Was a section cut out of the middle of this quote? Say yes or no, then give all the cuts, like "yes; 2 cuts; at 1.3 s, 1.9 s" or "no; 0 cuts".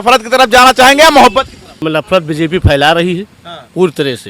yes; 1 cut; at 1.7 s